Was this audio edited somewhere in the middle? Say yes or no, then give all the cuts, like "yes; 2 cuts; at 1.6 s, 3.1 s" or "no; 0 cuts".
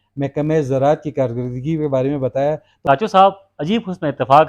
yes; 1 cut; at 2.7 s